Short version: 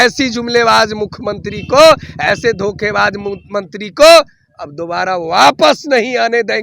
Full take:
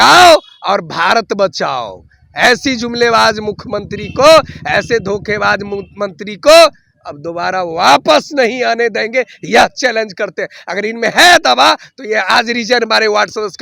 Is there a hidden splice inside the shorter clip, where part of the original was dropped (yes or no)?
no